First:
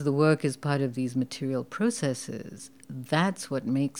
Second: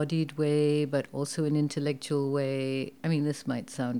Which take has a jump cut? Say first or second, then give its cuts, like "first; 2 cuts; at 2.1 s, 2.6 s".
second; 1 cut; at 2.9 s